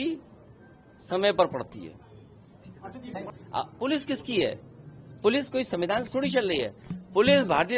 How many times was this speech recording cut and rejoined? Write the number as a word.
one